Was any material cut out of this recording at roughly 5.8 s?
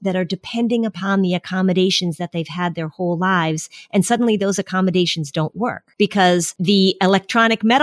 yes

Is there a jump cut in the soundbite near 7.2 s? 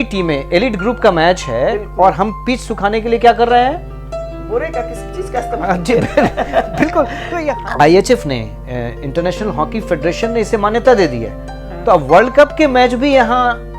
yes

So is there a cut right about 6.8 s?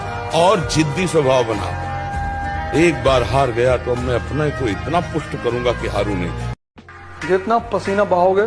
yes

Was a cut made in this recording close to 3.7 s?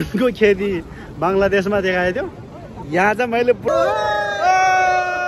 yes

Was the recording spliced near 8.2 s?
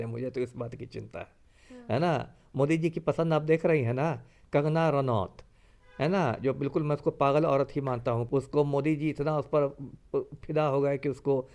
yes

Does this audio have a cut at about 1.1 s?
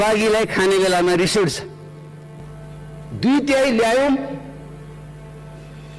no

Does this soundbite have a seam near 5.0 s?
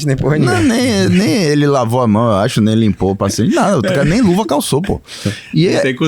no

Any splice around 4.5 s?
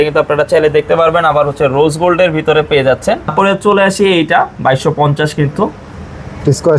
no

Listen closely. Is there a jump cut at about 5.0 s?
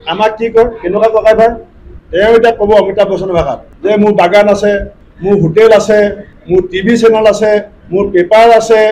no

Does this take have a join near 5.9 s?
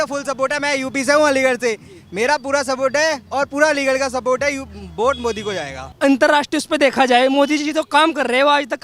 yes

